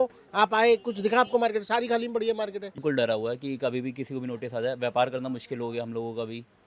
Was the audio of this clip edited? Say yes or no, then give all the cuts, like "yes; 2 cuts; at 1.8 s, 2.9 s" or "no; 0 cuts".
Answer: yes; 1 cut; at 2.7 s